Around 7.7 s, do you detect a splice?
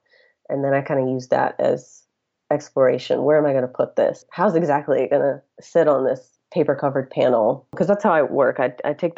yes; 1 cut; at 7.7 s

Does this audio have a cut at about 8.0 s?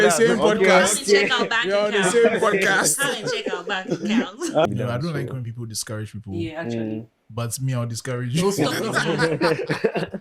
no; 1 cut; at 4.7 s

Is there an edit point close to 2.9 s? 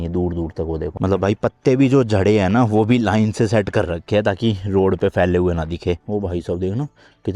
no; 2 cuts; at 0.9 s, 6.0 s

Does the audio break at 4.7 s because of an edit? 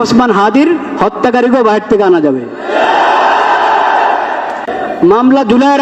yes; 1 cut; at 4.7 s

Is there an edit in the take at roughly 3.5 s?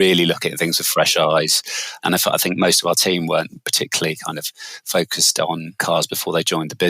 no; 2 cuts; at 1.9 s, 5.8 s

